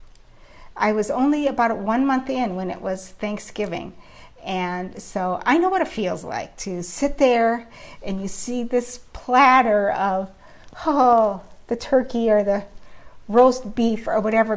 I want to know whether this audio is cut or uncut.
uncut